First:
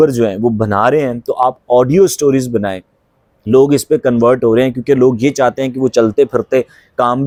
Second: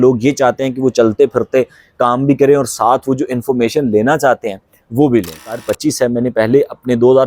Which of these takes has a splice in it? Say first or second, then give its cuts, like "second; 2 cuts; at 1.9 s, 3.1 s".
second; 1 cut; at 5.7 s